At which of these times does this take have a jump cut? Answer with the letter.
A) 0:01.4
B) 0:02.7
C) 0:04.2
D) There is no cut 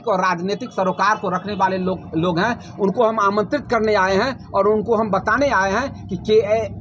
D